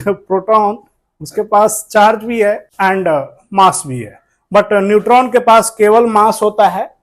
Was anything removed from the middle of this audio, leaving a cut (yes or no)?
yes